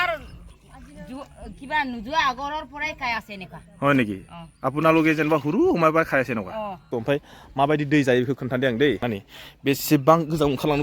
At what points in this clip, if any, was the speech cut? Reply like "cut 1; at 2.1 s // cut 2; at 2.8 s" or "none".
cut 1; at 6.8 s